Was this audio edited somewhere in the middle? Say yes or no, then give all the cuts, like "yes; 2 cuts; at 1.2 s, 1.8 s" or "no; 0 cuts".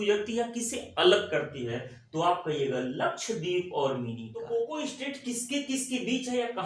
yes; 1 cut; at 4.4 s